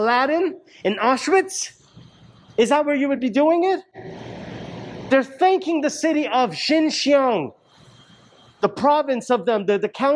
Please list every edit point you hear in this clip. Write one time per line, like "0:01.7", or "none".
none